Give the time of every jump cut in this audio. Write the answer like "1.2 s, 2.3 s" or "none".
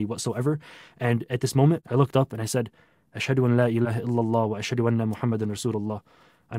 1.8 s